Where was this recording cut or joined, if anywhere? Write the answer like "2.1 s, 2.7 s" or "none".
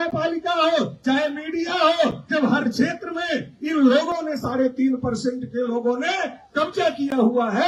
none